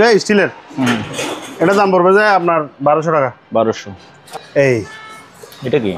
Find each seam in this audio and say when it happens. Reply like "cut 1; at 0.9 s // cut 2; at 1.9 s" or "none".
cut 1; at 4.2 s